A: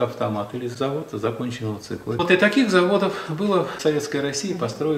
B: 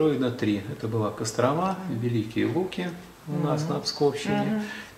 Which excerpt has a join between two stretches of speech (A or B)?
A